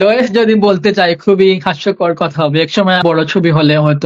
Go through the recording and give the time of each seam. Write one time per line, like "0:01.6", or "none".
0:03.0